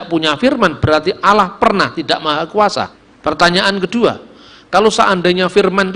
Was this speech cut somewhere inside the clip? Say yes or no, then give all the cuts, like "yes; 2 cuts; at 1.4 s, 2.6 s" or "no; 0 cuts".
yes; 1 cut; at 3.0 s